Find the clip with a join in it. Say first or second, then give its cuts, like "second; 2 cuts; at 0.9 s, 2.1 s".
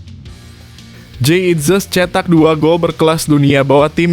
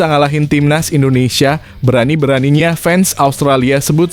first; 1 cut; at 1.1 s